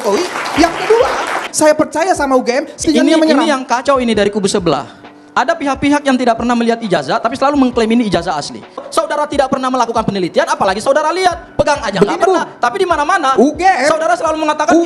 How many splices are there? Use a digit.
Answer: 3